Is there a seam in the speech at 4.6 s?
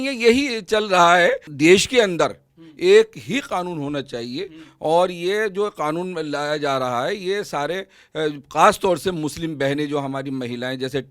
no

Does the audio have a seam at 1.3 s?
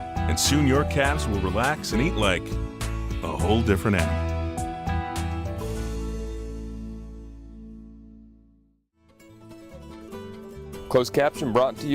no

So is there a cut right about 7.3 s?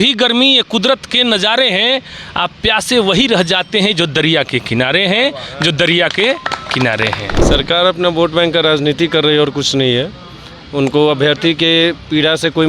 yes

